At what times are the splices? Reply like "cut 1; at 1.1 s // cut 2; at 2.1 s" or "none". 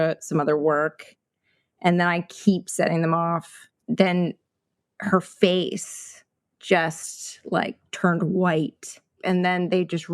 cut 1; at 3.8 s // cut 2; at 9.2 s